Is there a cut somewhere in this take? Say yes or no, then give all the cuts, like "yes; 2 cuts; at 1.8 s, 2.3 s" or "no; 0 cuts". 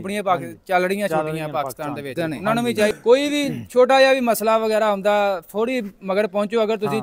yes; 1 cut; at 2.9 s